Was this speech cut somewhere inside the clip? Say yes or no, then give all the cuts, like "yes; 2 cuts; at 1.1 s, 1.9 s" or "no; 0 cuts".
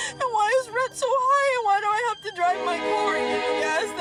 no; 0 cuts